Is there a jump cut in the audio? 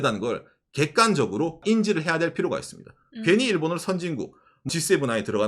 yes; 2 cuts; at 1.6 s, 4.7 s

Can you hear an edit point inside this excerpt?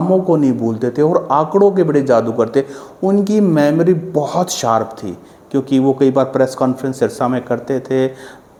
no; 0 cuts

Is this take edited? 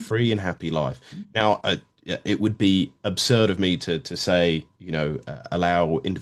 no; 0 cuts

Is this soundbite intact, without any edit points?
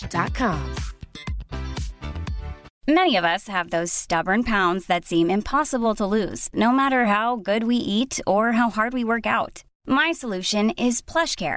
no; 1 cut; at 2.7 s

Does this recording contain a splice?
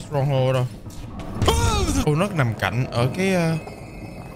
yes; 1 cut; at 2.0 s

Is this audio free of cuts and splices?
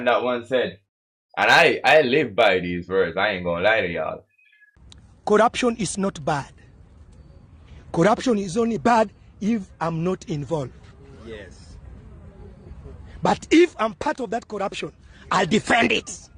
yes; 0 cuts

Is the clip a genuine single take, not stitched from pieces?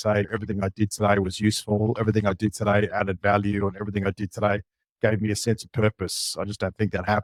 yes; 0 cuts

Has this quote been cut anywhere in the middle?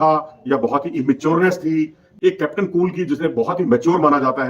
no; 0 cuts

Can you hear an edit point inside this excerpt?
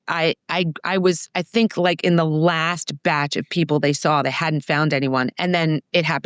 no; 0 cuts

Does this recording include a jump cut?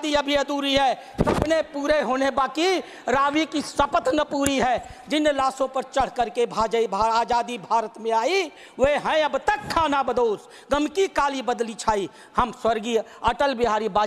no; 0 cuts

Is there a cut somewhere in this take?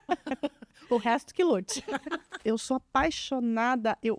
yes; 1 cut; at 2.4 s

